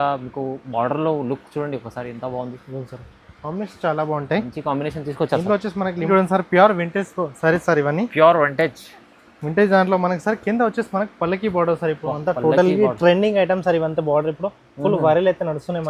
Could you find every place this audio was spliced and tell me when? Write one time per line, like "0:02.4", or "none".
0:06.1